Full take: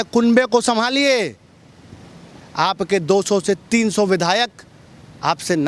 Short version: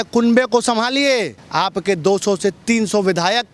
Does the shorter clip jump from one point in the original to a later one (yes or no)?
yes